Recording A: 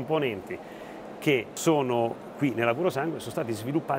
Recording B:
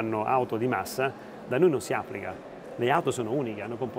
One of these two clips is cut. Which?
A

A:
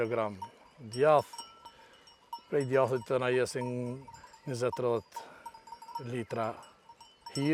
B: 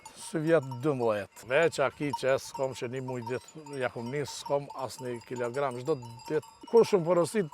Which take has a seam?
B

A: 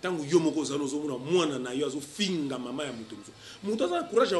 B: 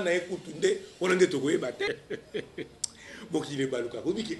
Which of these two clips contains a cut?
B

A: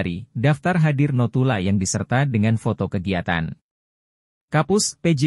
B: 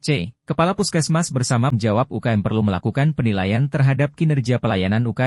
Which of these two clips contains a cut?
B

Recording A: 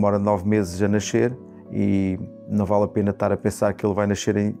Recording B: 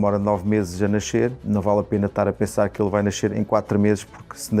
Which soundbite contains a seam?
B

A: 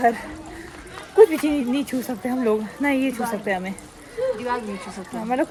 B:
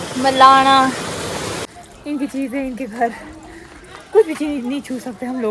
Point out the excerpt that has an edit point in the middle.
B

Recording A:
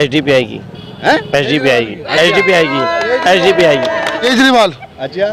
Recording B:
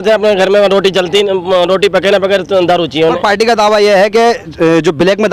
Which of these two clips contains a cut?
A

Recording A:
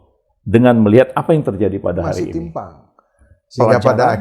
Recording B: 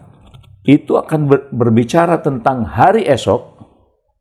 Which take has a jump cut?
A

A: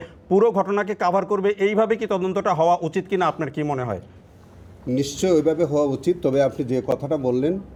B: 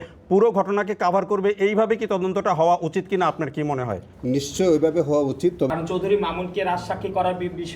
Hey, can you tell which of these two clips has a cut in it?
B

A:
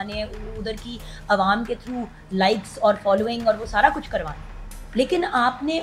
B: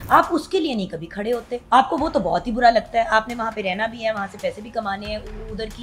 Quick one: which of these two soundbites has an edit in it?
B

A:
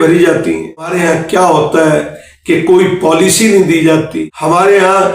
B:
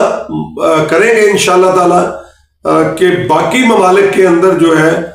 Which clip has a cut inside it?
A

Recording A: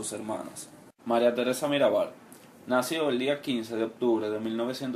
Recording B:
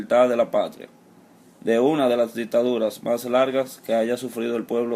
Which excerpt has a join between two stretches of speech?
B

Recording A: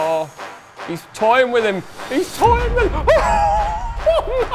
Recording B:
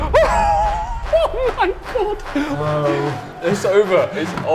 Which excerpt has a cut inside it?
B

